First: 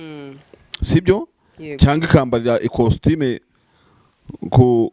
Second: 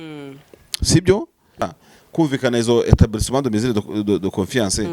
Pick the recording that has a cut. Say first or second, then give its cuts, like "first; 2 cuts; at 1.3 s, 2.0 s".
second; 1 cut; at 1.6 s